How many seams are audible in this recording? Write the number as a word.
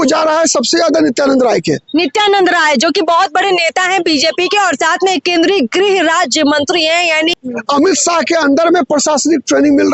one